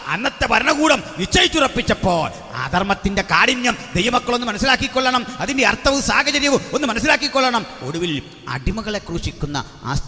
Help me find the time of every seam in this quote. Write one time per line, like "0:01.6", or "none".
none